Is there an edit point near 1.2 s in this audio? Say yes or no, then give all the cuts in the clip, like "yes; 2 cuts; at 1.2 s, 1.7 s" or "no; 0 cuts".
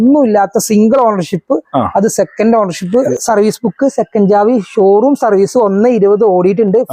no; 1 cut; at 3.1 s